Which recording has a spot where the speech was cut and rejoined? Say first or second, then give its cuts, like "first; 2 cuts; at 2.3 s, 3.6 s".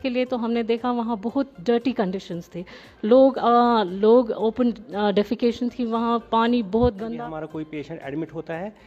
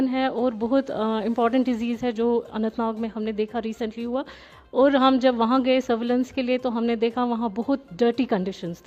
first; 1 cut; at 7.1 s